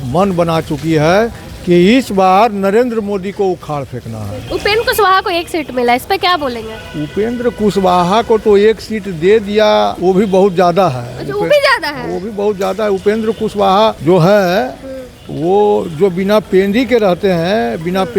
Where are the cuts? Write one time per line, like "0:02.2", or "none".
0:04.4
0:10.0
0:14.0